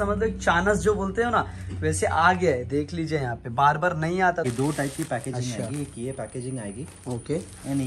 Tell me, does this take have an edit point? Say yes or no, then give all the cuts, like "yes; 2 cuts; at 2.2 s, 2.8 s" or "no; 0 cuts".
yes; 1 cut; at 4.5 s